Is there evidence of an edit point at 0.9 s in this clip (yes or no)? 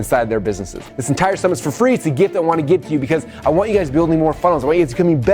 yes